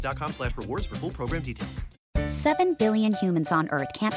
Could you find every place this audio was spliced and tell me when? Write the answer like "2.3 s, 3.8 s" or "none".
1.9 s